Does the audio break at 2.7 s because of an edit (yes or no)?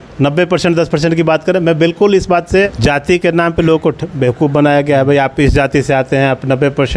yes